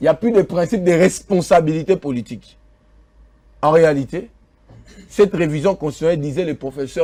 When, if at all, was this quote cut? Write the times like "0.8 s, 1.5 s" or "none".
none